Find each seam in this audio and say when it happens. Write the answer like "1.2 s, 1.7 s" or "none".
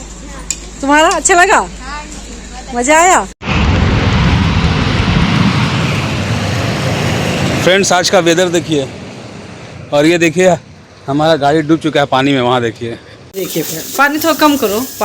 3.3 s, 13.1 s